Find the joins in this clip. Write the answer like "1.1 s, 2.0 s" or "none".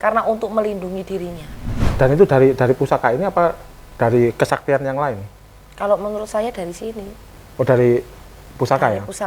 1.8 s